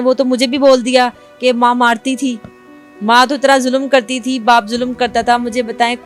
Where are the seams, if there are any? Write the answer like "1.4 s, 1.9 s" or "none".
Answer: none